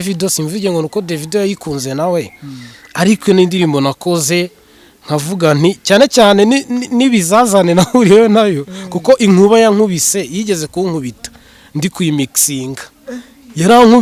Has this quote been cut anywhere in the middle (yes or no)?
no